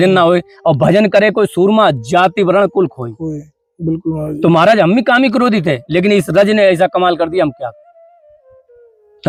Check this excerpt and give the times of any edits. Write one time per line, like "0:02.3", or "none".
none